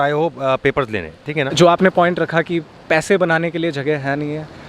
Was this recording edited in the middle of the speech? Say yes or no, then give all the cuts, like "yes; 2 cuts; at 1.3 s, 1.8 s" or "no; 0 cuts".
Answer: yes; 1 cut; at 1.5 s